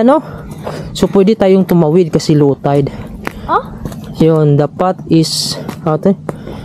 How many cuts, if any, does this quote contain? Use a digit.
0